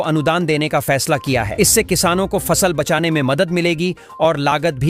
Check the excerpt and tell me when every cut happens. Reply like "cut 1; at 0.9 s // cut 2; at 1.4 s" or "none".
none

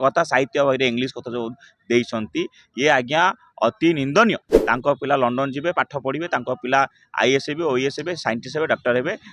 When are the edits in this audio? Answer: cut 1; at 4.5 s

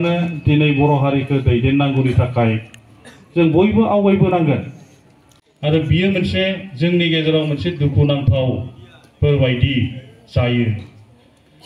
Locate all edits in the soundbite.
cut 1; at 5.5 s

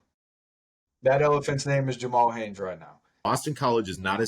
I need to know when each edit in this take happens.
cut 1; at 3.3 s

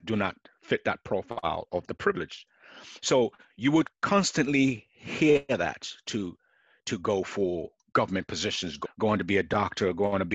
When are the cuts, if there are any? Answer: none

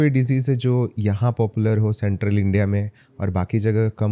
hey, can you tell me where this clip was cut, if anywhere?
none

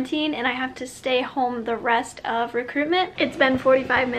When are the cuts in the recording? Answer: cut 1; at 3.1 s

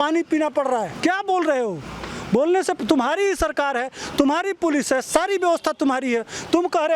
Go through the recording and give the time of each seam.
cut 1; at 0.9 s

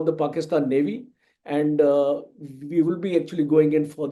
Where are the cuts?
none

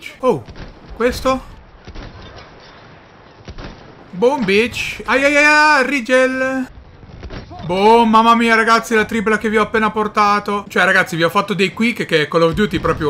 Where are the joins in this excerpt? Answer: cut 1; at 10.6 s

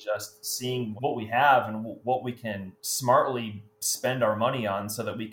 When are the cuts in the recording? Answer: none

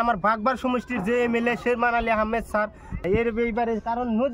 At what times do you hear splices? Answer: cut 1; at 3.0 s

